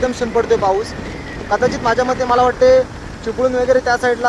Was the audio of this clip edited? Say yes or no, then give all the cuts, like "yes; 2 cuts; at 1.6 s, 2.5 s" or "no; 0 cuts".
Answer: no; 0 cuts